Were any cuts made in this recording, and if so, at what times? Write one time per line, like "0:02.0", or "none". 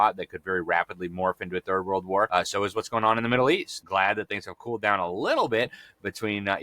0:02.3
0:03.7